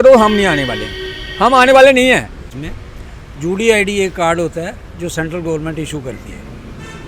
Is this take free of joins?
no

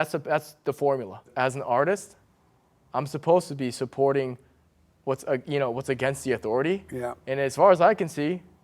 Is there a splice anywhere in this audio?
yes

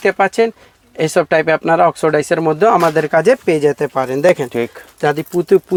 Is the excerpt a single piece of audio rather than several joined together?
yes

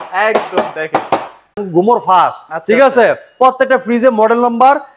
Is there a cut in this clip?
yes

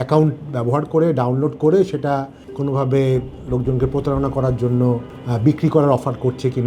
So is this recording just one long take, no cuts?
yes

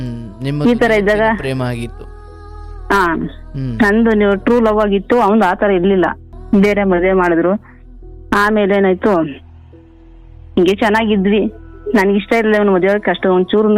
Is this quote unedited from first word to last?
no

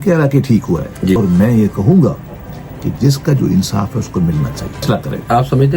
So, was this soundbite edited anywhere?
yes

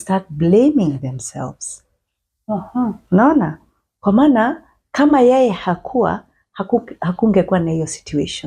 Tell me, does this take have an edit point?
no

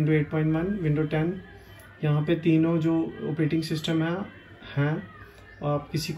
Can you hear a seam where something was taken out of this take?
no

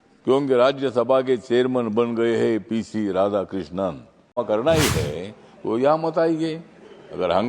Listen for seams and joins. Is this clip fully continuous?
no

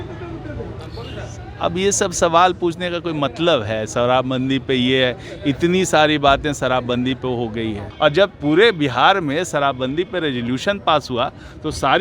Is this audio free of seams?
no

